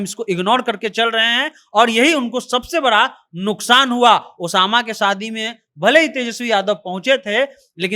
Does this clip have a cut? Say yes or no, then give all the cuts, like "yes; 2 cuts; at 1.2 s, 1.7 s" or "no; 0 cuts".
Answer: no; 0 cuts